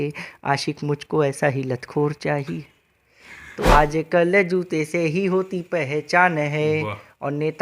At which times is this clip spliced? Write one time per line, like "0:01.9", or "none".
0:03.6